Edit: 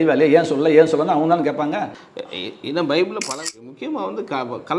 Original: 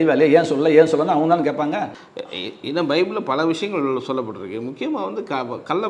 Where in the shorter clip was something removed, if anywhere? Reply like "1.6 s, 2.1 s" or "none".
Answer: 3.3 s